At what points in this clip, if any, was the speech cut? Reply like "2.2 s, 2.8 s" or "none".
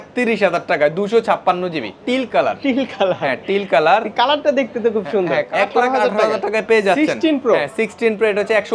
1.9 s, 5.5 s